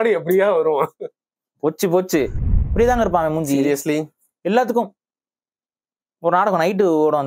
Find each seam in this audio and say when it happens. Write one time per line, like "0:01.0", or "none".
0:02.4